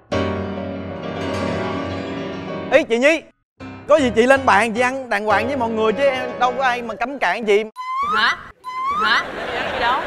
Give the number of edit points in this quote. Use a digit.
0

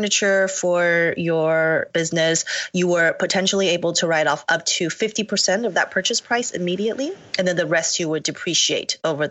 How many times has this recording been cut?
0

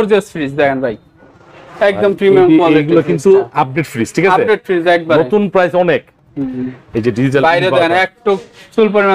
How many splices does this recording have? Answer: 0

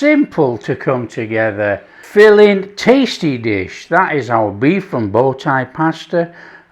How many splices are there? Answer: 1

